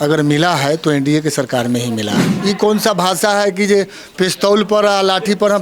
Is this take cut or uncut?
cut